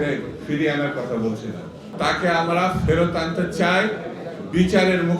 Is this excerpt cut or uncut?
cut